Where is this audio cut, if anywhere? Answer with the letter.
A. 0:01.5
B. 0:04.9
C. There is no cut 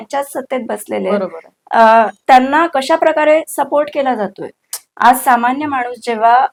C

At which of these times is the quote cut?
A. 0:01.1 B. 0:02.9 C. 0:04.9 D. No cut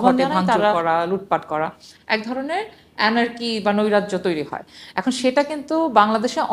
D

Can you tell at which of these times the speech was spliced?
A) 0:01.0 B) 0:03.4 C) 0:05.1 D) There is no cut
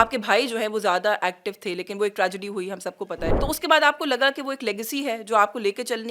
B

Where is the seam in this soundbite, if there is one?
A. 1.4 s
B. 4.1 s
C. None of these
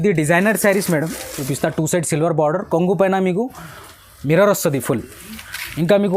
A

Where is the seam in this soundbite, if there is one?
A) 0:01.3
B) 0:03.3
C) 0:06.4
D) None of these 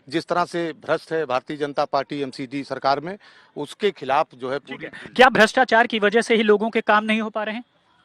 D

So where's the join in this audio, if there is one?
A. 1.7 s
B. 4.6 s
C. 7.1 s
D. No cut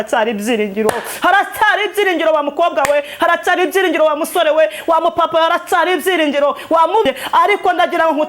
C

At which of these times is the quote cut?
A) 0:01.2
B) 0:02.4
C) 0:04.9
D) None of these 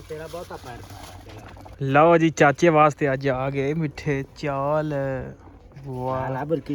A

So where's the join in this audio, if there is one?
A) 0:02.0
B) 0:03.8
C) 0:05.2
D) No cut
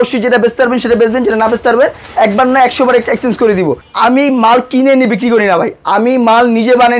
B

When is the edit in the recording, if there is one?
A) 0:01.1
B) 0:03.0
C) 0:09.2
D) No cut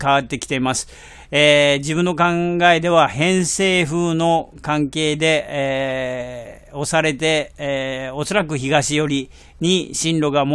A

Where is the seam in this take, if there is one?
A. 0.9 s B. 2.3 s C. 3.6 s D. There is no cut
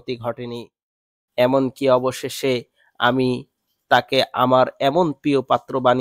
A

